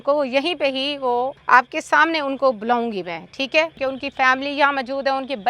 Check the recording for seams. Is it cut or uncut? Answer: cut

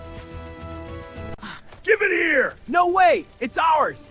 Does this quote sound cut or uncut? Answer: cut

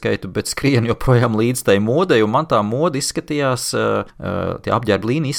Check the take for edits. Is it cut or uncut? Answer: cut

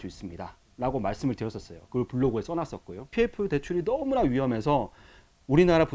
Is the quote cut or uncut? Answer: cut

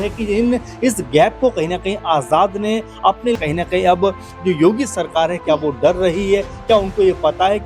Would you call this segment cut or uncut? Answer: cut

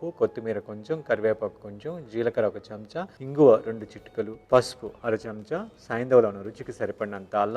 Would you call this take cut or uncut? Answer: uncut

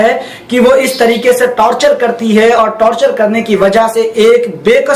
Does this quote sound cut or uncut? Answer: uncut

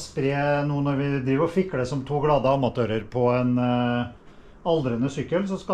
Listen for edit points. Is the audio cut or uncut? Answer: uncut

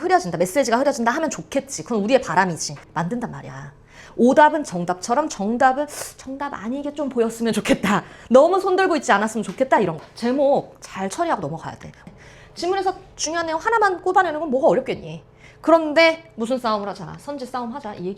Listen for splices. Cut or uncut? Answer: cut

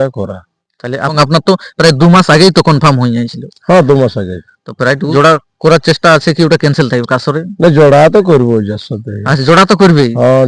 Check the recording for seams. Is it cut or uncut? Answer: cut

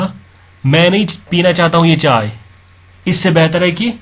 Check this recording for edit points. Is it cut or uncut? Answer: uncut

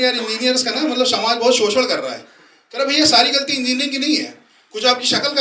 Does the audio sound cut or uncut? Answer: uncut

